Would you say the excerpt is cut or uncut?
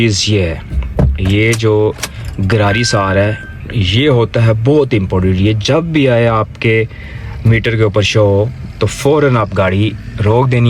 uncut